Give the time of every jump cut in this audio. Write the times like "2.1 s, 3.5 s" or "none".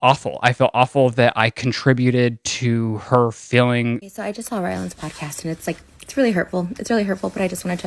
4.1 s